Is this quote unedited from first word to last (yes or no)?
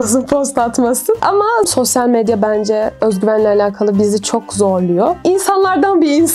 no